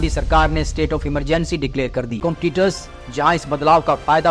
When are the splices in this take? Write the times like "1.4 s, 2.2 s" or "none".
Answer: 2.2 s